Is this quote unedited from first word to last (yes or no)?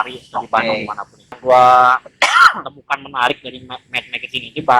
no